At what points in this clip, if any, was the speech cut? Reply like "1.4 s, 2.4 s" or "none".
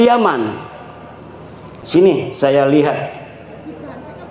1.8 s